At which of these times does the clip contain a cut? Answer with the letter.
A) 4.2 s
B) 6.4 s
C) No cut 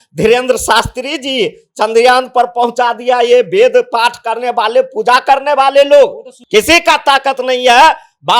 B